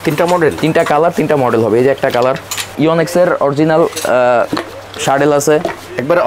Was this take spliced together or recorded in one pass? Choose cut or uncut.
cut